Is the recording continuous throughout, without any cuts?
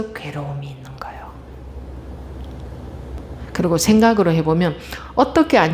yes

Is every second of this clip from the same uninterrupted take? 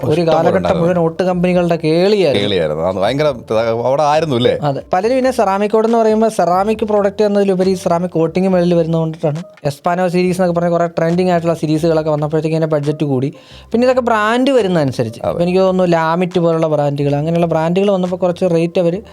no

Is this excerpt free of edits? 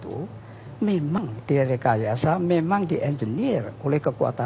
no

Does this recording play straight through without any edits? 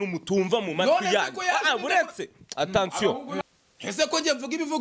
no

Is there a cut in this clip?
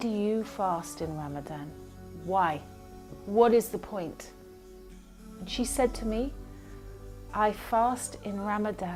no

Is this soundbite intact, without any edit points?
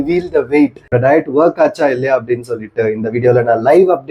no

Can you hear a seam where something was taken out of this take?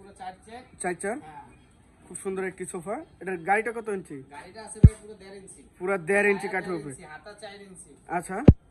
no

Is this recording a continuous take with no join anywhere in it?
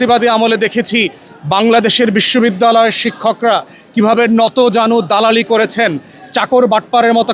yes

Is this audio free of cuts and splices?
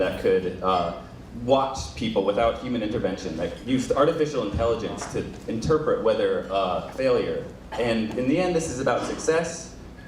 yes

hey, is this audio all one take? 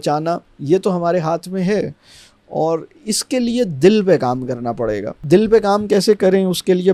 yes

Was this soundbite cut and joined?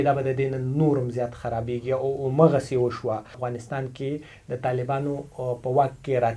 yes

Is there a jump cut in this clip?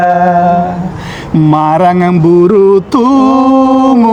no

